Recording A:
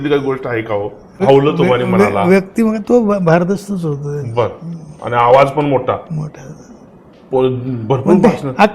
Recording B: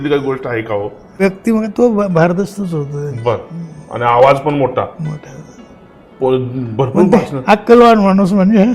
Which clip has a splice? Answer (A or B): B